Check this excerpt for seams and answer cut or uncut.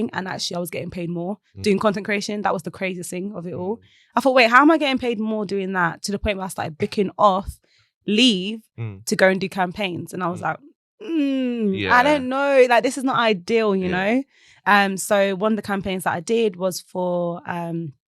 uncut